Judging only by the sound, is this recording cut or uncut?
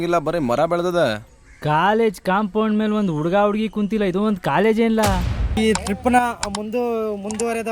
cut